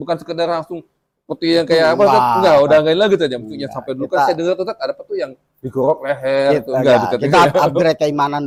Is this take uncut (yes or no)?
yes